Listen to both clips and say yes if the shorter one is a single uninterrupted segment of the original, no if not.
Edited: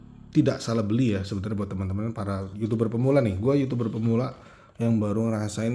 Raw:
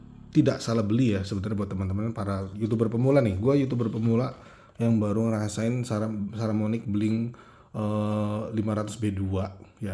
yes